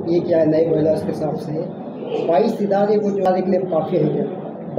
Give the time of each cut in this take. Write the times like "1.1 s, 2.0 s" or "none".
3.3 s